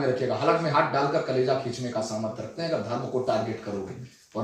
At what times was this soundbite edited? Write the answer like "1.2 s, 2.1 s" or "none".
none